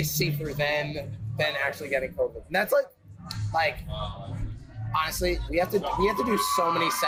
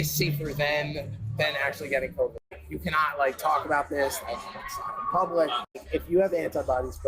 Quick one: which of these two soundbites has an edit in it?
second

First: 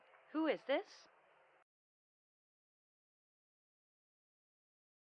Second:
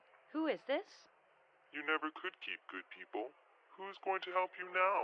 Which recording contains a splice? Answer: second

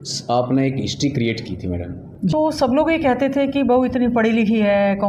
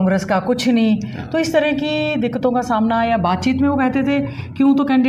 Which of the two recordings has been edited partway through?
first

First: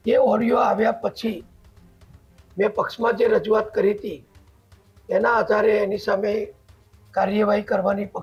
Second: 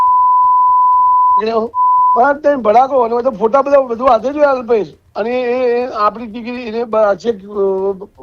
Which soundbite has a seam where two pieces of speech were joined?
second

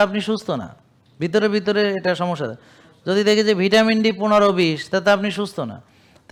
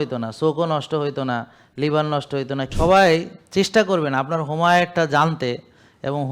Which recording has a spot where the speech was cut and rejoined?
second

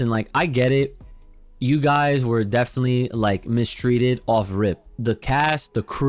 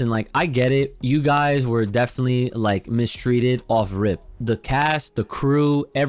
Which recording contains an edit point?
second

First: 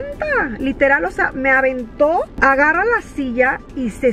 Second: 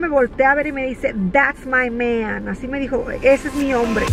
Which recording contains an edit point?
first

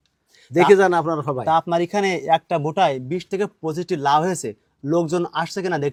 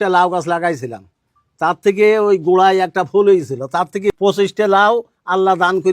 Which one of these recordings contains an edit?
second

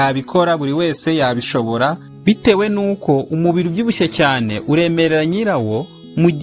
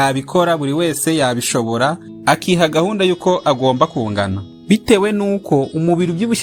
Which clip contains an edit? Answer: first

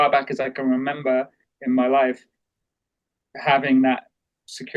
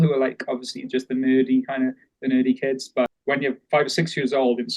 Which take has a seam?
second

